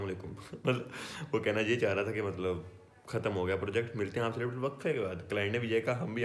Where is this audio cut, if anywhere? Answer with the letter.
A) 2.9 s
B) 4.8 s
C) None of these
C